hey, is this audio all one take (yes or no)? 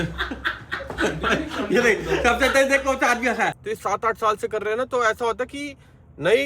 no